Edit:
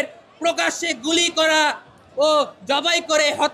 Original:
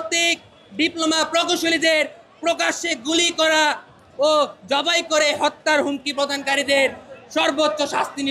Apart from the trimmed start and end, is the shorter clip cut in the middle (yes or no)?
no